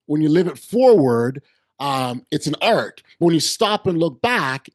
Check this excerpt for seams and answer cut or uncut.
uncut